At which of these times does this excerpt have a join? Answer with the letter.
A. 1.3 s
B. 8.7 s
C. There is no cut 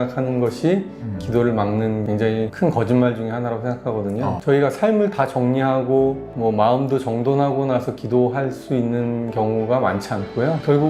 C